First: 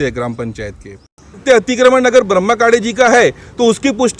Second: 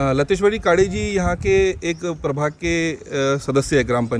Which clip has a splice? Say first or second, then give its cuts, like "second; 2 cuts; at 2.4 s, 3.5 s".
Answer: first; 1 cut; at 1.4 s